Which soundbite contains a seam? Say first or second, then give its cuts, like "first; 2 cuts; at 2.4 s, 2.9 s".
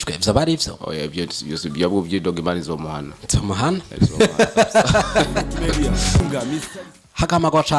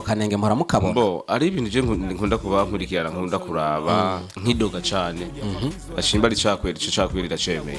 first; 1 cut; at 6.2 s